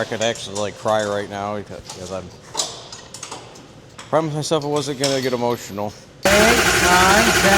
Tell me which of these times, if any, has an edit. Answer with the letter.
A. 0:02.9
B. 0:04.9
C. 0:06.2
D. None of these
C